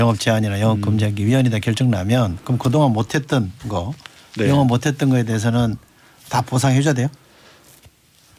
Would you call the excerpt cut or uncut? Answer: uncut